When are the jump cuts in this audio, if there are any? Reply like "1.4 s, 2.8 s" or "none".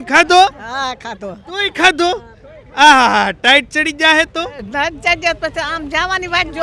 none